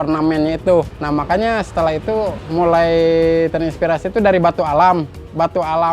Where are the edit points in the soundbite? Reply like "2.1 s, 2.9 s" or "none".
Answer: 1.0 s, 2.4 s